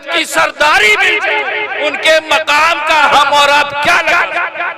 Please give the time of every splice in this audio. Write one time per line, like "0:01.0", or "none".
0:03.1

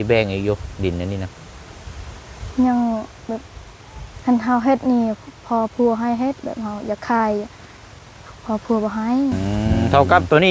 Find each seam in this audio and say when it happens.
0:09.4

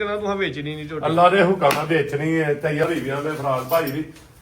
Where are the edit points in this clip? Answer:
0:02.8

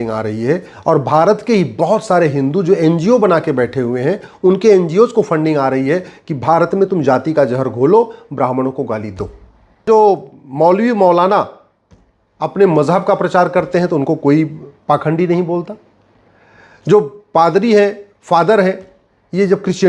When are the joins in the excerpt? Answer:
0:09.9

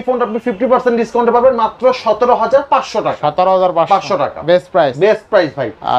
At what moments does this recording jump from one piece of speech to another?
none

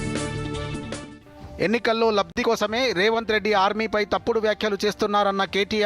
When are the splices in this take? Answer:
0:01.0

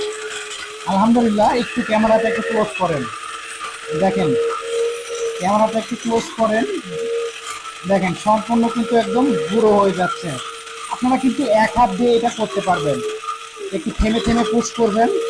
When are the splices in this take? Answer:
none

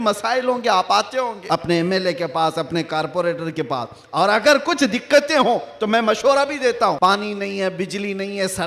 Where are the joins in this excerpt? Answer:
0:01.4
0:07.0

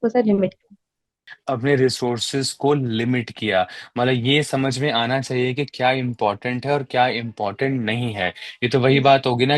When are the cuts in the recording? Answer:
0:01.3

